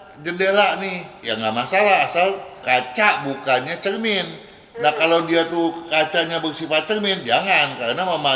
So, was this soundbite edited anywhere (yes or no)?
yes